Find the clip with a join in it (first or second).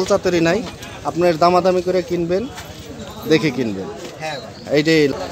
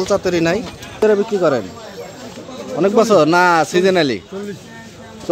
second